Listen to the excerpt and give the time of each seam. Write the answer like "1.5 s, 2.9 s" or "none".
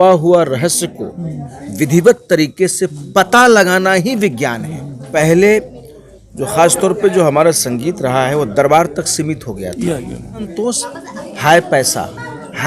5.0 s, 10.5 s